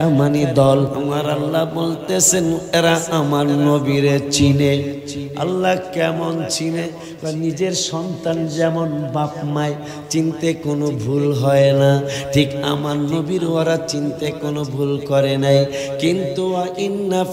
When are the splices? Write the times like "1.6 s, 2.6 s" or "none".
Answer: 1.0 s